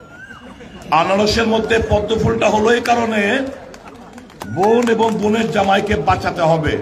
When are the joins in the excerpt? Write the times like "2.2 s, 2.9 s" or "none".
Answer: none